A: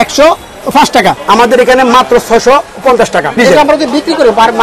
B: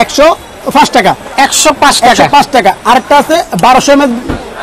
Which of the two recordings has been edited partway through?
A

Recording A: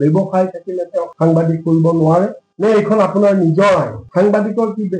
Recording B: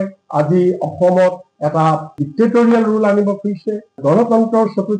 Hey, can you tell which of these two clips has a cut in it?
A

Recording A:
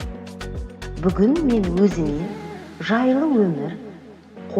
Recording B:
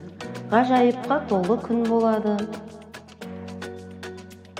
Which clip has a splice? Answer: A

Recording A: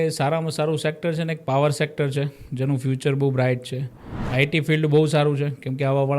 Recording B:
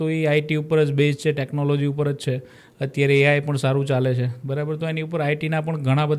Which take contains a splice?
A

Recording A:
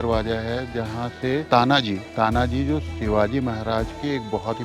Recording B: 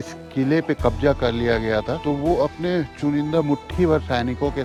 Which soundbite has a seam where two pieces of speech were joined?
A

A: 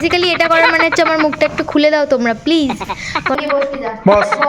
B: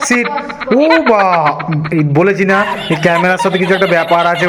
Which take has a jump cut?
A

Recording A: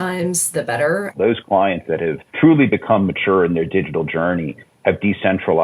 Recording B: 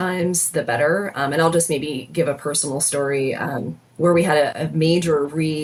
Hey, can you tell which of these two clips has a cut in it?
A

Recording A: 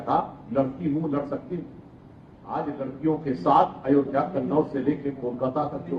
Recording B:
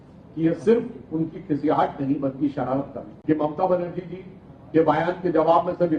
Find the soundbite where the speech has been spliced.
B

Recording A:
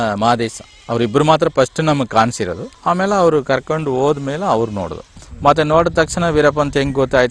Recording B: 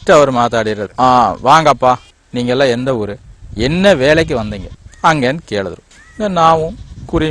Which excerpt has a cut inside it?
A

